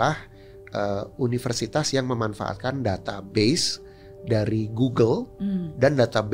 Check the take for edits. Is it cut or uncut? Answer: uncut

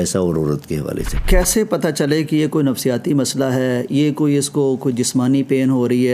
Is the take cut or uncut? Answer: cut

